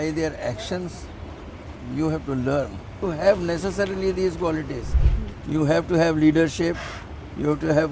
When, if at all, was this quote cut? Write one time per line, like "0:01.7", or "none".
0:02.9